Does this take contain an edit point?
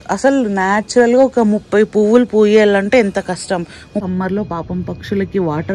yes; 1 cut; at 4.0 s

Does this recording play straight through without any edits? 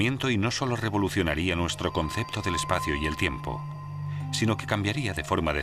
no; 1 cut; at 2.3 s

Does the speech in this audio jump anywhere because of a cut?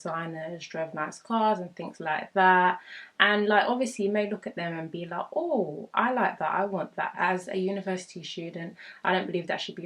yes; 1 cut; at 7.1 s

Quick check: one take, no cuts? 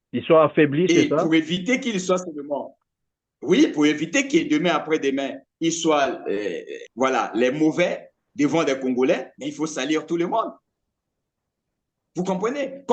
yes; 0 cuts

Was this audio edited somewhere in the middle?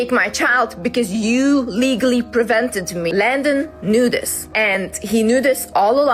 yes; 2 cuts; at 3.1 s, 4.4 s

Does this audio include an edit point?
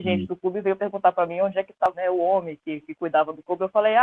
yes; 1 cut; at 1.9 s

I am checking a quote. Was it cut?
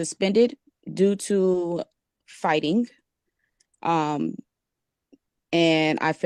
no; 0 cuts

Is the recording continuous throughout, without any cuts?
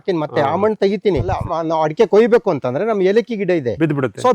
no; 1 cut; at 1.4 s

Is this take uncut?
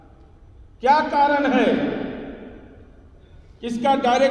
yes; 0 cuts

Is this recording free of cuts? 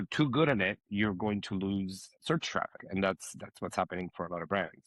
no; 1 cut; at 2.8 s

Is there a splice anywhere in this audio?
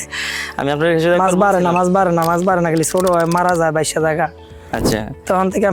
no; 0 cuts

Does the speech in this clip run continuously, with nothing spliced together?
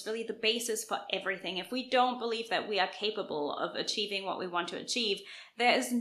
yes; 0 cuts

